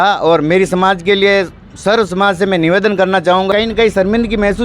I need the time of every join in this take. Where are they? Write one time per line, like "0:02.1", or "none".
0:03.5